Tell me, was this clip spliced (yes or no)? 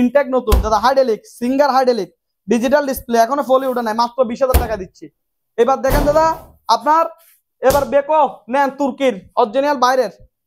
no